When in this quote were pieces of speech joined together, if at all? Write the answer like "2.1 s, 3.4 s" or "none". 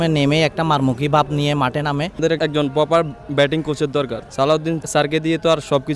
2.3 s, 4.7 s

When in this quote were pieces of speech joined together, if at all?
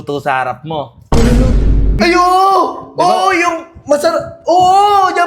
2.0 s

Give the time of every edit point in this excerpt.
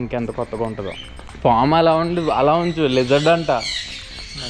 1.2 s

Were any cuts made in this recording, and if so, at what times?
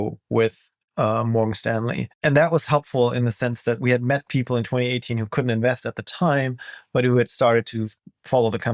2.1 s

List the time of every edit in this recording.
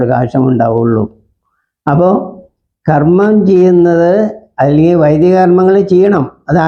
none

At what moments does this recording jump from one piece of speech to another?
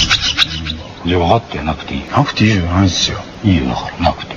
1.9 s, 3.2 s

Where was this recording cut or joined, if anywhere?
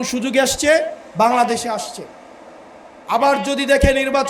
none

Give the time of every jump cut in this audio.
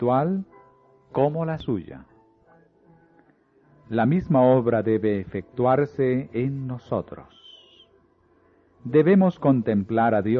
none

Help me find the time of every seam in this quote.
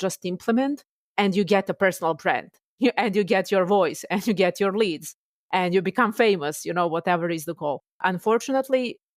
7.9 s

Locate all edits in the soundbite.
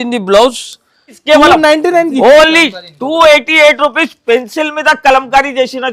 1.2 s

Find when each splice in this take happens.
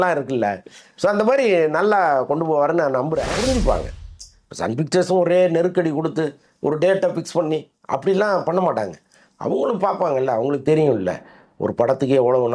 3.3 s

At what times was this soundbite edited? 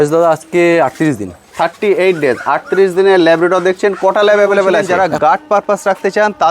4.9 s

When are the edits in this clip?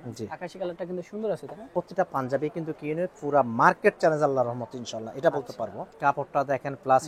1.6 s, 5.9 s

